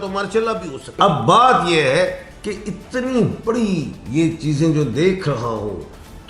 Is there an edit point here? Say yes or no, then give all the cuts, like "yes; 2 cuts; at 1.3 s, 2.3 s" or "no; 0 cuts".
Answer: yes; 1 cut; at 1.0 s